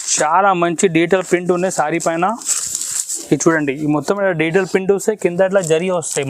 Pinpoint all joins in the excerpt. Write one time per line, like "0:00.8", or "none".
none